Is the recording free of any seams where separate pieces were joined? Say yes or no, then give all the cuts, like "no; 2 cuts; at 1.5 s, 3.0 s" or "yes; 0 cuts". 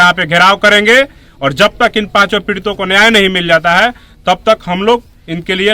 yes; 0 cuts